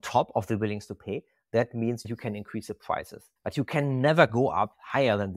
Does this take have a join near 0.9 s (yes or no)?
no